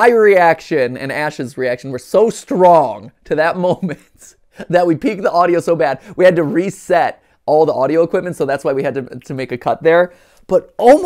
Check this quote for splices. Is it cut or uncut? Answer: uncut